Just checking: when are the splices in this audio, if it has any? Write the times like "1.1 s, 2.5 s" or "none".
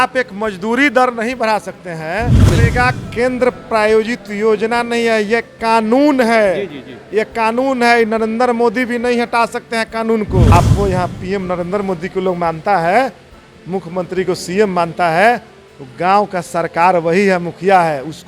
2.5 s, 10.5 s